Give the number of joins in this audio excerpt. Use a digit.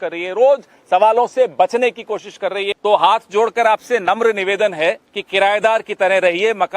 2